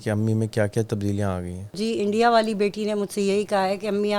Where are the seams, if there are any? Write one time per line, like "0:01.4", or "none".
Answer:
0:01.8